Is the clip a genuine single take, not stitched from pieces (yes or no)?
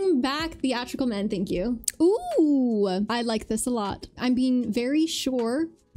no